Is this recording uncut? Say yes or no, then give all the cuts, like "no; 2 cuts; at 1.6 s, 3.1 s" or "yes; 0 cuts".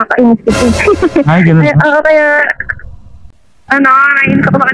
yes; 0 cuts